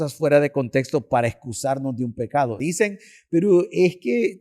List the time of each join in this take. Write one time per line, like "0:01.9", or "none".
0:02.6